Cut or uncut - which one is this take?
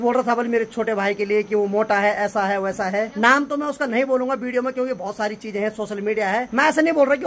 cut